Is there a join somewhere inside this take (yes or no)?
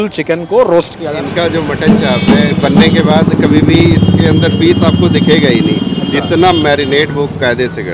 yes